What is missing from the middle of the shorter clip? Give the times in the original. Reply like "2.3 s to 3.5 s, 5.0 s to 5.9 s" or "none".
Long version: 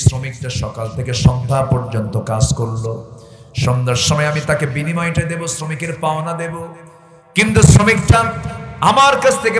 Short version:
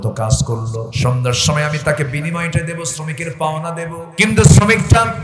3.0 s to 3.5 s, 6.6 s to 7.2 s